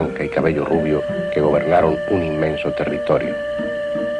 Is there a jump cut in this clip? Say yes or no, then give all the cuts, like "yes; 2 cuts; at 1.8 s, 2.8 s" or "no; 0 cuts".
no; 0 cuts